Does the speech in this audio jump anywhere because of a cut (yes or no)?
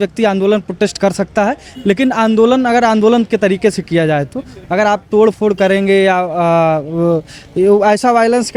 no